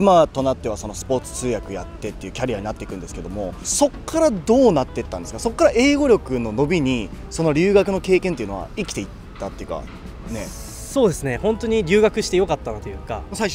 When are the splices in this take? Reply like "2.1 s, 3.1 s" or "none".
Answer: none